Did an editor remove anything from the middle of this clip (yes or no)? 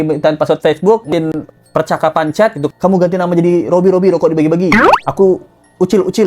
yes